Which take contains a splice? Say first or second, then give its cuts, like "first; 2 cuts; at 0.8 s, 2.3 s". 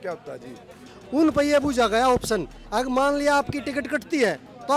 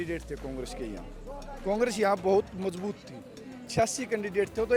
first; 1 cut; at 0.9 s